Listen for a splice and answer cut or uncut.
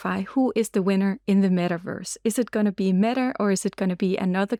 uncut